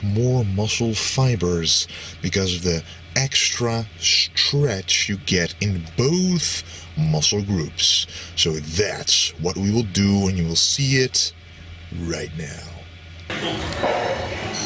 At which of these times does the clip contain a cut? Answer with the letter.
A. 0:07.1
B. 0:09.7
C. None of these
A